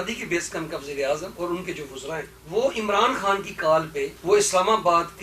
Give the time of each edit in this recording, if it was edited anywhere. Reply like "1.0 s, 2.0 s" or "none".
2.3 s, 4.1 s